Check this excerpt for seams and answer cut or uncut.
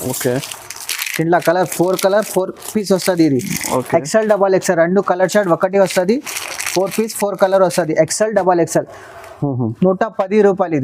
uncut